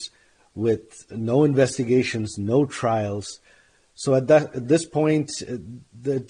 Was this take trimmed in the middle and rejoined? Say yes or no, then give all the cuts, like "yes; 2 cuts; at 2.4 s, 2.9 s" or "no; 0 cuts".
no; 0 cuts